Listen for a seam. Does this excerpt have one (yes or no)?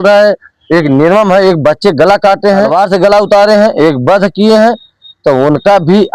yes